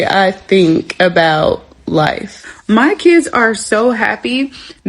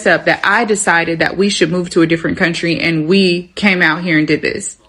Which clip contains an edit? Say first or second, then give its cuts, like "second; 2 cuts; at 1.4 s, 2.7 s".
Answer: first; 1 cut; at 2.5 s